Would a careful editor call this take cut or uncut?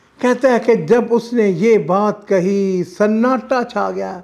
uncut